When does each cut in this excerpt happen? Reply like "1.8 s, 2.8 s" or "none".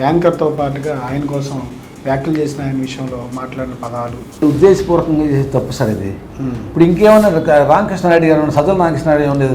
4.4 s